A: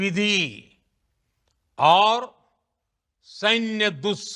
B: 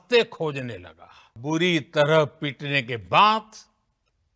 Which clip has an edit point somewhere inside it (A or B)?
B